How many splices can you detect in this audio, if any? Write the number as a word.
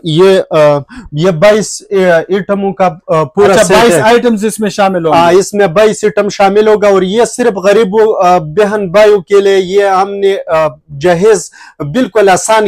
zero